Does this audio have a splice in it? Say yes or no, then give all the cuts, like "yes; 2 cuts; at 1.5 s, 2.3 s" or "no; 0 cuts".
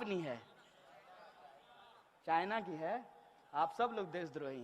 no; 0 cuts